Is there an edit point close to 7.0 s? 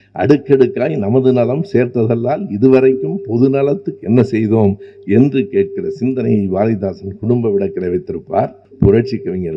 no; 1 cut; at 8.6 s

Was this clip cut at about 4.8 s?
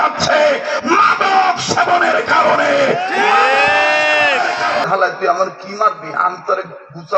yes; 1 cut; at 4.8 s

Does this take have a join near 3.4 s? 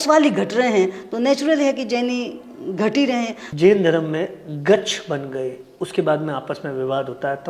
yes; 1 cut; at 3.4 s

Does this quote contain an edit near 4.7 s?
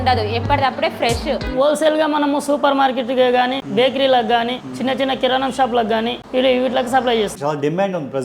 yes; 5 cuts; at 1.5 s, 3.6 s, 4.7 s, 6.2 s, 7.4 s

